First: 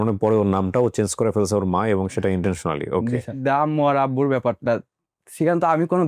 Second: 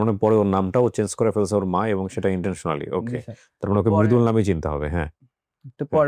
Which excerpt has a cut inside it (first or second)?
first